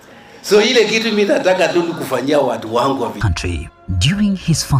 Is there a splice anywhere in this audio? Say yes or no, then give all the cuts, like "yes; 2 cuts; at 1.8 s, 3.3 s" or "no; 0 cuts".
yes; 1 cut; at 3.2 s